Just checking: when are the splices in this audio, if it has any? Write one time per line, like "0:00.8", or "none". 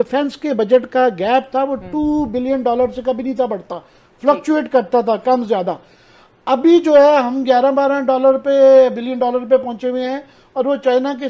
none